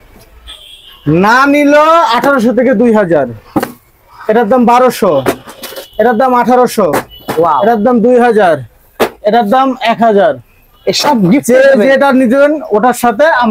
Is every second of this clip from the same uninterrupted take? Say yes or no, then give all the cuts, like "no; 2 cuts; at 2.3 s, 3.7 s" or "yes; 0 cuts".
yes; 0 cuts